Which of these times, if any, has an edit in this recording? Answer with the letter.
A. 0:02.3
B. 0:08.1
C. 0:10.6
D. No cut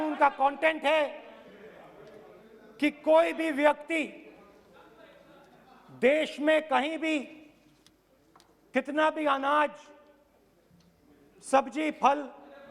D